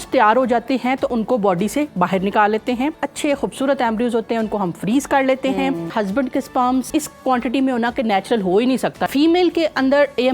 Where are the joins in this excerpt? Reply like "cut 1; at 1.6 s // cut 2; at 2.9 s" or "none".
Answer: cut 1; at 1.1 s // cut 2; at 3.0 s // cut 3; at 5.9 s // cut 4; at 6.9 s // cut 5; at 9.1 s